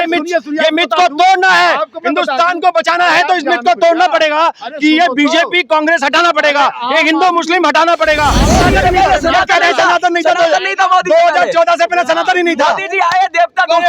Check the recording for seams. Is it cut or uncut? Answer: cut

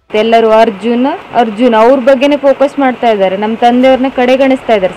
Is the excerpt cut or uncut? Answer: cut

